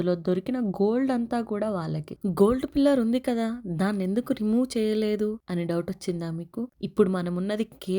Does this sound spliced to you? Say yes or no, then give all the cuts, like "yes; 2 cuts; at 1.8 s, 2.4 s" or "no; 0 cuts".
yes; 1 cut; at 6.8 s